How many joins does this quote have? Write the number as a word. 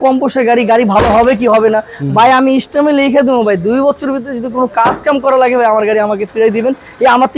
zero